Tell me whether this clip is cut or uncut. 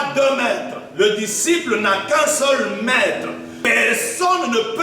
cut